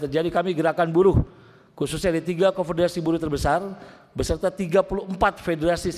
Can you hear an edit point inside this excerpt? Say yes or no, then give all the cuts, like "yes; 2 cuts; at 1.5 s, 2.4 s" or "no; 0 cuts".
no; 0 cuts